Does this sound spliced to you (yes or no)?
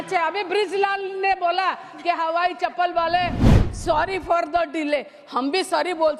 yes